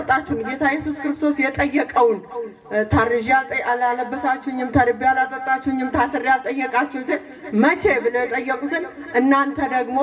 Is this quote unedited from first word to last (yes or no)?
yes